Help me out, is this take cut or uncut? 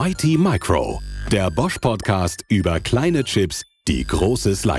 uncut